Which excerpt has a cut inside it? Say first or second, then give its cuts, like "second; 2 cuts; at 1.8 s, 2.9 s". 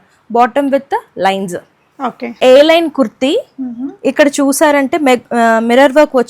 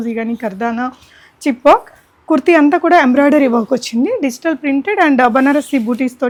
first; 1 cut; at 2.3 s